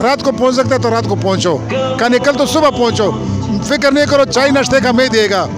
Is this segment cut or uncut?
uncut